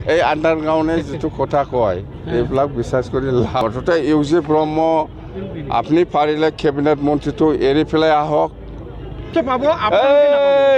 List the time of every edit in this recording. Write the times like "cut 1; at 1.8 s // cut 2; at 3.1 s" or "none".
cut 1; at 3.5 s // cut 2; at 9.3 s